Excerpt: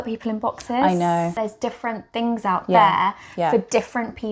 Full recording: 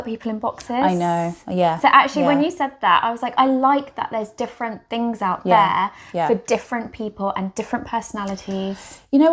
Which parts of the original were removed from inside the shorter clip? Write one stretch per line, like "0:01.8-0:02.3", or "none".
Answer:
0:01.4-0:04.1